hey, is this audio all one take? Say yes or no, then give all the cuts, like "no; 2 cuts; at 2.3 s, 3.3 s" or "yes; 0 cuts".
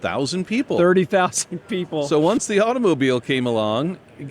no; 1 cut; at 2.4 s